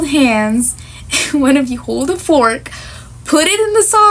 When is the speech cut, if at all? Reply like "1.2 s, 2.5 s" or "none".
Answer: none